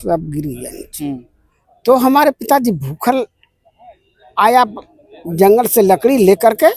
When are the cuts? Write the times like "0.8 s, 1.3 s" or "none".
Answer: none